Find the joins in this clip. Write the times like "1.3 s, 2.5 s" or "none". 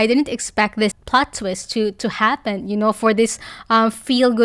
1.0 s